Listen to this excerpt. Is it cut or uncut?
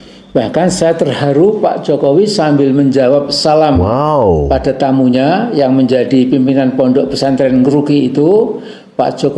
cut